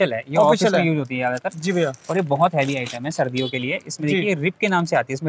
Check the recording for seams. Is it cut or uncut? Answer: uncut